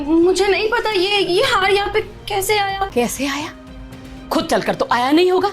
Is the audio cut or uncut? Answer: cut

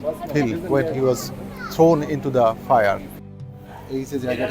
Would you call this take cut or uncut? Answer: cut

